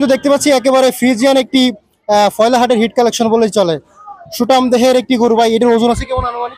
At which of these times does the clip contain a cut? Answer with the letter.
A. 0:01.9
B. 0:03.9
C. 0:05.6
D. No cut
D